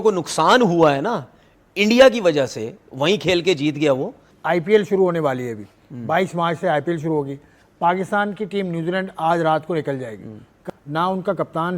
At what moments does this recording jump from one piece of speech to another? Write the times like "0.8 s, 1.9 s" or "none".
4.3 s, 10.5 s